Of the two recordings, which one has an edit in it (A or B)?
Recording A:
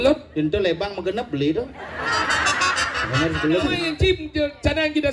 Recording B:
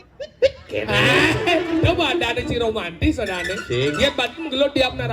A